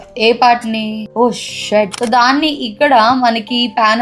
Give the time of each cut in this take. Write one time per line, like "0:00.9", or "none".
0:02.0